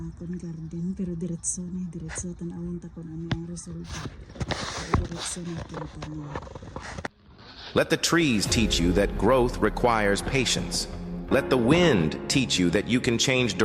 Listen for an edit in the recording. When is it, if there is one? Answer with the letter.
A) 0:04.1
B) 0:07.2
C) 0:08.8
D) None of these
B